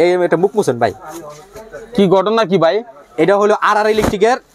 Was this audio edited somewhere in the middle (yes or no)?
no